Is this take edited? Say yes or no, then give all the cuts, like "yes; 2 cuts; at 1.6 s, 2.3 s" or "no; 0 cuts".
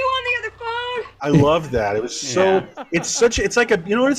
yes; 1 cut; at 1.2 s